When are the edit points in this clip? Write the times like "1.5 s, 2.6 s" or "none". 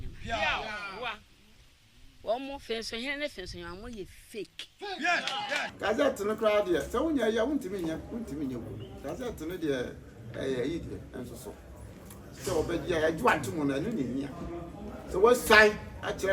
5.6 s

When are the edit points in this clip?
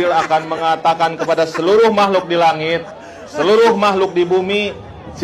1.6 s

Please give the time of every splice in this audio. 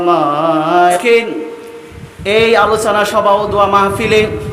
1.0 s

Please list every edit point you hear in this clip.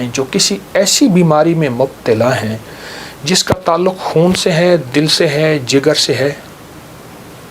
none

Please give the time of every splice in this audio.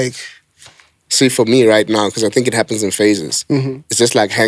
none

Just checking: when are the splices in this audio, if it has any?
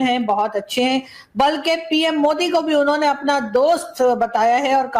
none

